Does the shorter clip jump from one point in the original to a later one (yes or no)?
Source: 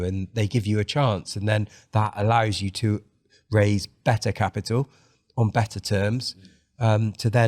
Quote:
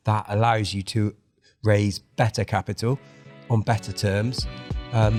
no